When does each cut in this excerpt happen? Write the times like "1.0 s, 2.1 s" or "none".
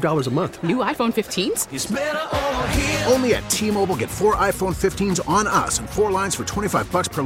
none